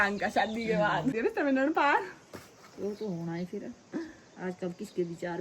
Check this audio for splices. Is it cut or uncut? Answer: cut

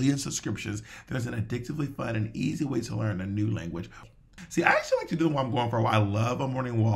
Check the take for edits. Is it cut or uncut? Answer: cut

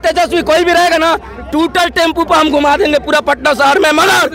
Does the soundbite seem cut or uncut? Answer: uncut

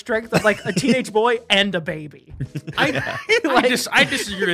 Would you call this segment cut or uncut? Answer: uncut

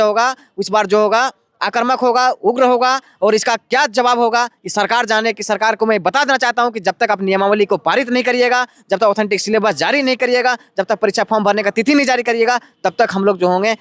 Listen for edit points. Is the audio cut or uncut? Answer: uncut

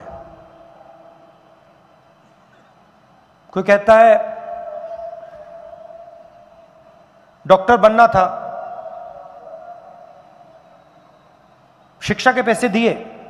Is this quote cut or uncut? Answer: uncut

